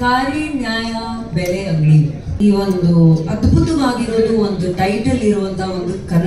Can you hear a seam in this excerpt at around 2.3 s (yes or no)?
yes